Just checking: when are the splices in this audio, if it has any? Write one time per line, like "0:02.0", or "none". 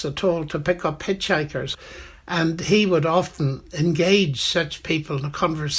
0:01.7